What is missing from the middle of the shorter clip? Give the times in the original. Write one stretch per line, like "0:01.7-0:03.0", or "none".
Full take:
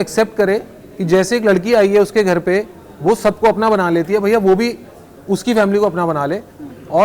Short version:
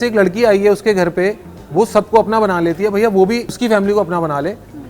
0:04.9-0:05.4